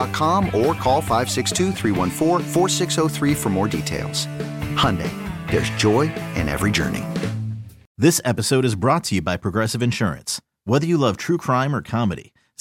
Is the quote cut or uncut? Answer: cut